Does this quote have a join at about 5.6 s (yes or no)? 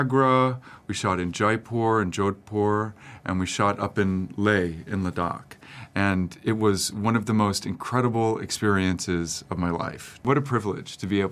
no